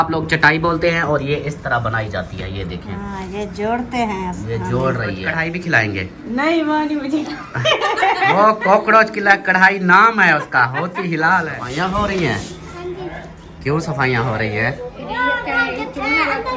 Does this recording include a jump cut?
yes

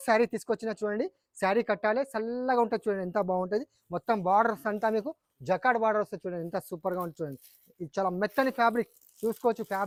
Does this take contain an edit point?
no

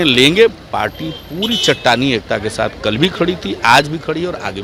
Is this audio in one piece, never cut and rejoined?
yes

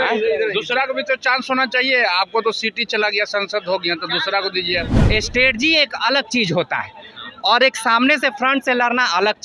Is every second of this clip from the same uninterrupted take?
no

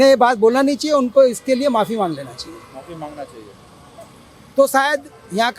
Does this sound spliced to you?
no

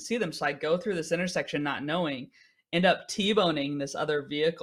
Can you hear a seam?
no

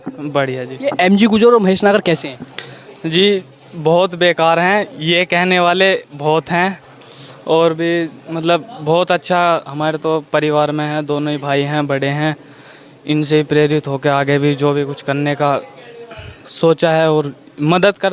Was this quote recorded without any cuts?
yes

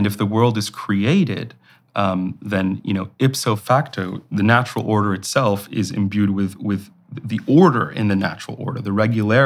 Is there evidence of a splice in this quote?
yes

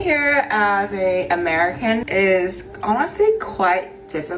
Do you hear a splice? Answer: yes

